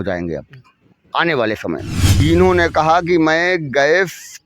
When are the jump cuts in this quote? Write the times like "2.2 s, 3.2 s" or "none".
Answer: 2.2 s